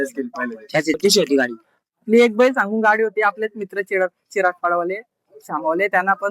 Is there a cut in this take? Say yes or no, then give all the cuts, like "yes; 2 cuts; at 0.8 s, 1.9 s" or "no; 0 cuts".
yes; 1 cut; at 0.9 s